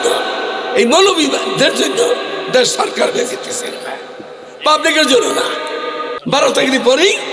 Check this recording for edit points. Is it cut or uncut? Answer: cut